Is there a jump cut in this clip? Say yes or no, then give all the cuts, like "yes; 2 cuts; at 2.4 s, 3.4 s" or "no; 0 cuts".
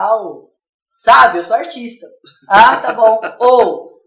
yes; 1 cut; at 2.3 s